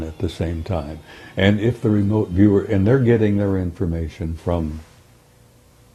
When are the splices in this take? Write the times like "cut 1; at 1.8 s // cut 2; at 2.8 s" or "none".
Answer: none

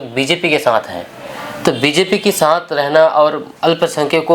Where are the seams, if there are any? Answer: none

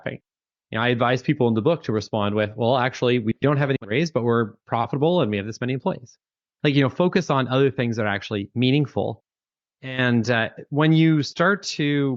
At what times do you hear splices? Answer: none

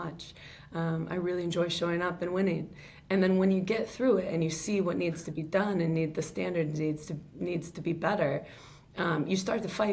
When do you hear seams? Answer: none

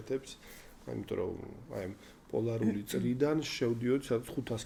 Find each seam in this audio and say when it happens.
none

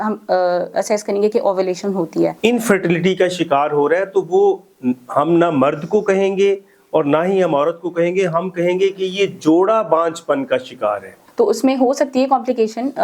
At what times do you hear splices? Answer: cut 1; at 2.4 s // cut 2; at 11.2 s

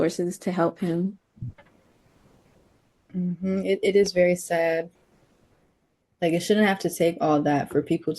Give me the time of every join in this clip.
cut 1; at 5.0 s

